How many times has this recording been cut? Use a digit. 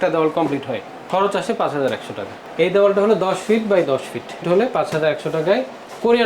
3